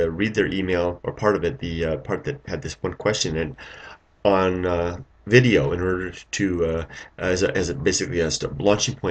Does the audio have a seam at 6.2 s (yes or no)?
yes